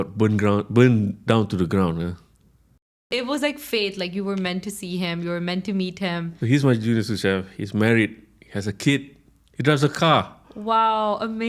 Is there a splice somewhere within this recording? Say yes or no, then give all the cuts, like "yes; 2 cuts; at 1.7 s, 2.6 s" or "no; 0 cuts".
yes; 2 cuts; at 3.1 s, 6.3 s